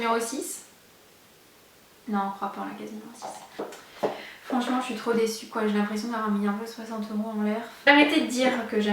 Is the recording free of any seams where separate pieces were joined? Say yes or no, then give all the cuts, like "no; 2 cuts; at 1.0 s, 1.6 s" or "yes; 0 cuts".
no; 2 cuts; at 3.5 s, 7.9 s